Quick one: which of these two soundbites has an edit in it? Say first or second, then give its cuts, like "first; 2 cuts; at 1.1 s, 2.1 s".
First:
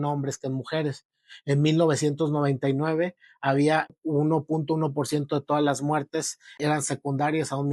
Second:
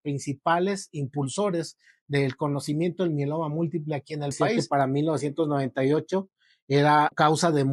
second; 1 cut; at 4.6 s